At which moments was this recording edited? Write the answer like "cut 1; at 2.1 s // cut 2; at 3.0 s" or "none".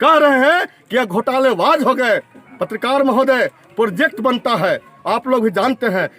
none

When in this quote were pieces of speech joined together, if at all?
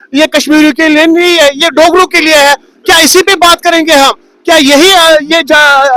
none

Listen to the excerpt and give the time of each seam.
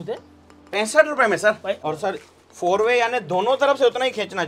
cut 1; at 1.8 s

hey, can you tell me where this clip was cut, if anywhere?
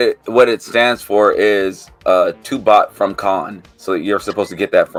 none

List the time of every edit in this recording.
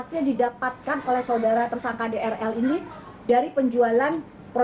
none

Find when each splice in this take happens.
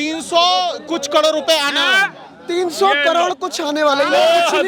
none

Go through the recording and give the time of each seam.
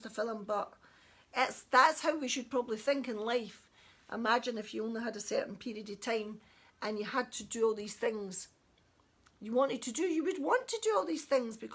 none

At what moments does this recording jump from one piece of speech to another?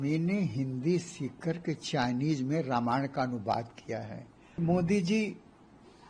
cut 1; at 4.6 s

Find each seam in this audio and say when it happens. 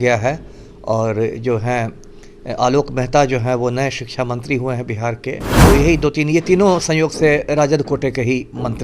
cut 1; at 5.5 s

